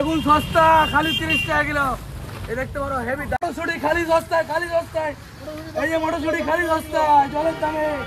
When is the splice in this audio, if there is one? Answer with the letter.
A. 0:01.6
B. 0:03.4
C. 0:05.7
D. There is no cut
B